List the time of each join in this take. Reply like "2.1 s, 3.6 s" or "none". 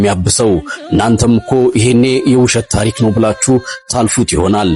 none